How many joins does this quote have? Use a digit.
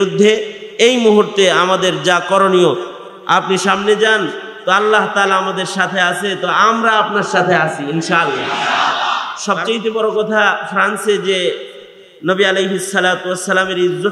1